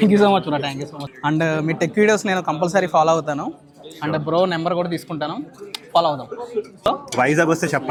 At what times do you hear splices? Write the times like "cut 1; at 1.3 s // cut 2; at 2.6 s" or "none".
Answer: none